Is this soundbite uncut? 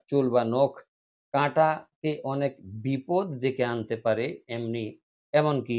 yes; 0 cuts

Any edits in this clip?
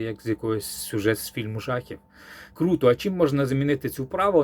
yes; 1 cut; at 2.4 s

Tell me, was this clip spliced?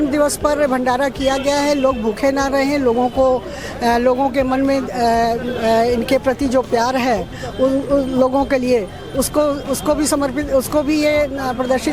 no; 0 cuts

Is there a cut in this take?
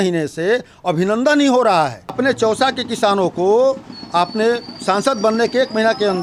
yes; 1 cut; at 2.1 s

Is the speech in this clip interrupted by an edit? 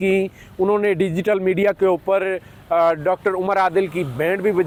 no; 0 cuts

